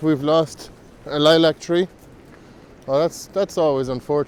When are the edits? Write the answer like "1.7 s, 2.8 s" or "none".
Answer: none